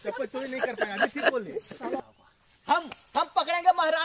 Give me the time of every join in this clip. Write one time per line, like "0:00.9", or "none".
0:02.0